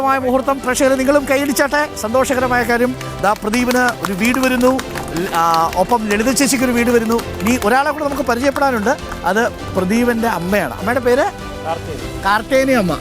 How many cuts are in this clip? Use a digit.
0